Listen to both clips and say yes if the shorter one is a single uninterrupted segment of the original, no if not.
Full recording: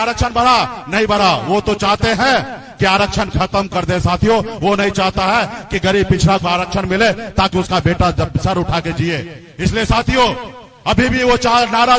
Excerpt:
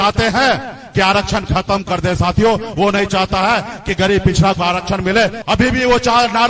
no